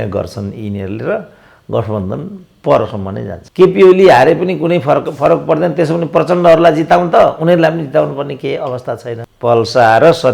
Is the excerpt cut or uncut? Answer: cut